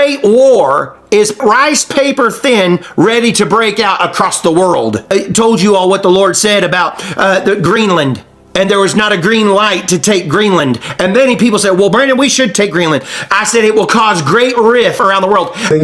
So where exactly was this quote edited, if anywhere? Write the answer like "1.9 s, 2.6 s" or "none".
1.4 s, 5.1 s, 15.1 s